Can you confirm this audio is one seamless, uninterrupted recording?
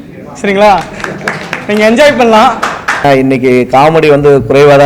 no; 1 cut; at 3.0 s

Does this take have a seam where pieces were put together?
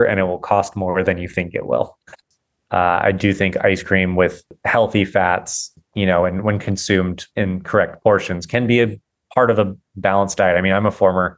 yes; 4 cuts; at 2.1 s, 4.6 s, 5.7 s, 7.2 s

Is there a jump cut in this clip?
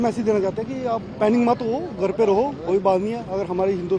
no; 0 cuts

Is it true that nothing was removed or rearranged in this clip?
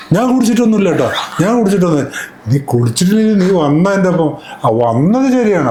yes; 0 cuts

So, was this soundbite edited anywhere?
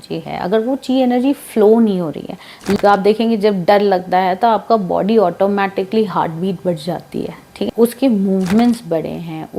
yes; 2 cuts; at 2.8 s, 7.7 s

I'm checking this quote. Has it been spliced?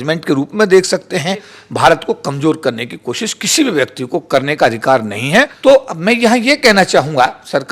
yes; 2 cuts; at 1.6 s, 5.5 s

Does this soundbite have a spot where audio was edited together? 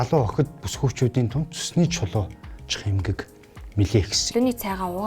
yes; 1 cut; at 4.2 s

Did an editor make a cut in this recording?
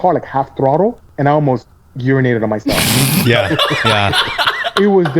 yes; 1 cut; at 1.0 s

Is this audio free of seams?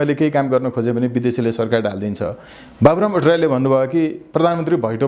yes; 0 cuts

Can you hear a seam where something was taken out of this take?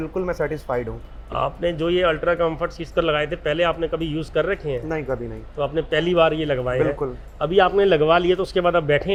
no; 0 cuts

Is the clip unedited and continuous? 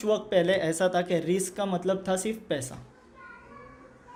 yes; 0 cuts

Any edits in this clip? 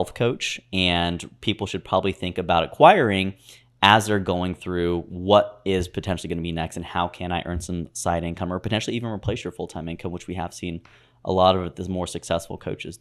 no; 0 cuts

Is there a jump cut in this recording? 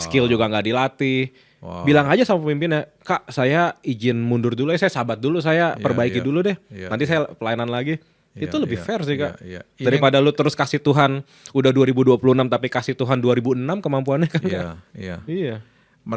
no; 0 cuts

